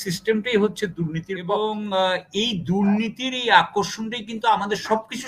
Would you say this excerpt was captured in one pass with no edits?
no; 1 cut; at 1.4 s

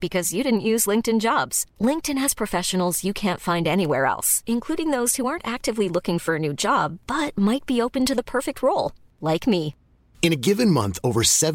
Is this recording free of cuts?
yes; 0 cuts

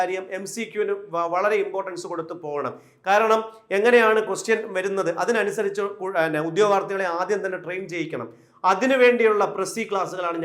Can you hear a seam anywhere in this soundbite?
no; 0 cuts

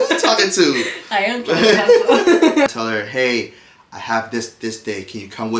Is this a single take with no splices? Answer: no; 1 cut; at 2.7 s

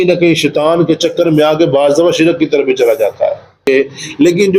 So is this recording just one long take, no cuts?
no; 1 cut; at 3.7 s

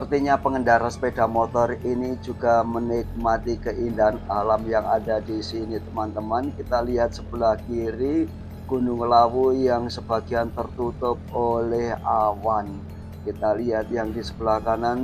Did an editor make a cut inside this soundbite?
no; 0 cuts

